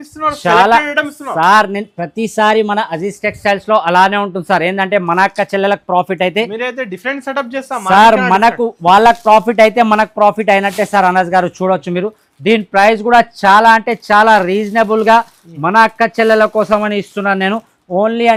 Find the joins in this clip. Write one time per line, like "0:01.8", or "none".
none